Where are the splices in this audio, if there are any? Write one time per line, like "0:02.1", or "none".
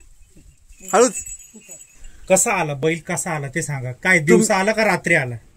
0:01.9